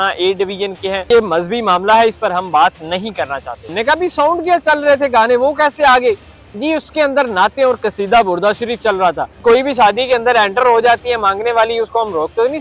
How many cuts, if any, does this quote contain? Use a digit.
3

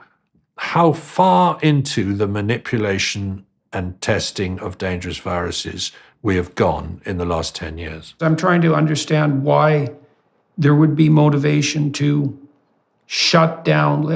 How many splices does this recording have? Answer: 1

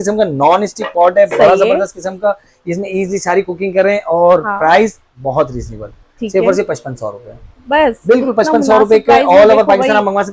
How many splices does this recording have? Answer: 0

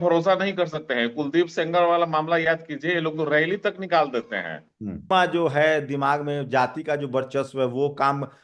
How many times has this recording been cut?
1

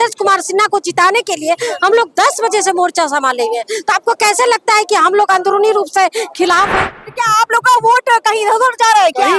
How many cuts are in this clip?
1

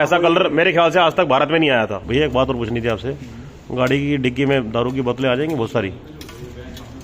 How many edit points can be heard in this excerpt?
1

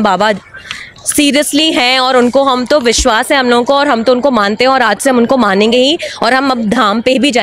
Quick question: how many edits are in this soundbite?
0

